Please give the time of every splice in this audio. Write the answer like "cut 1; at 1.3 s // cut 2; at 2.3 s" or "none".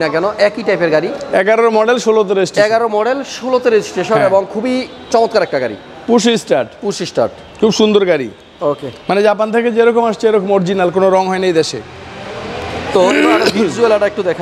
none